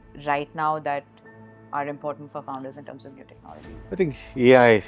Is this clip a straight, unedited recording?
yes; 0 cuts

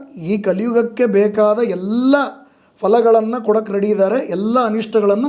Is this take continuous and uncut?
yes; 0 cuts

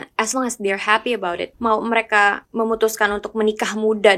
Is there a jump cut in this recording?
yes; 2 cuts; at 1.5 s, 2.4 s

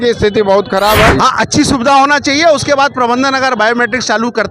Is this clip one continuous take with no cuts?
no; 1 cut; at 1.1 s

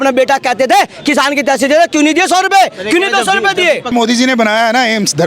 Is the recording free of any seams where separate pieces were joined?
no; 1 cut; at 3.9 s

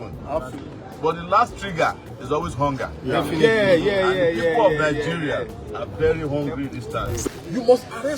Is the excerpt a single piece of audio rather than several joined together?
no; 1 cut; at 7.2 s

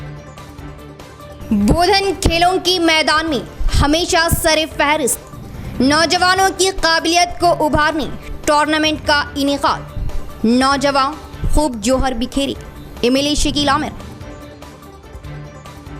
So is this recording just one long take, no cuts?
no; 1 cut; at 1.3 s

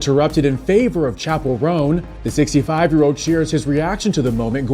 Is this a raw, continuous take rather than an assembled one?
yes; 0 cuts

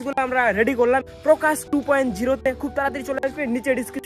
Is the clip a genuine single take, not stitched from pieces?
no; 1 cut; at 1.0 s

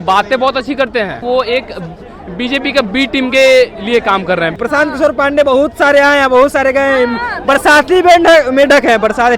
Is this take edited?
yes; 2 cuts; at 1.2 s, 4.6 s

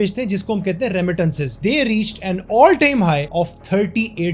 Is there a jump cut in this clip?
yes; 2 cuts; at 1.6 s, 3.3 s

